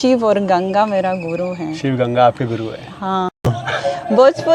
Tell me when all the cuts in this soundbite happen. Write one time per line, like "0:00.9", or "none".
0:03.6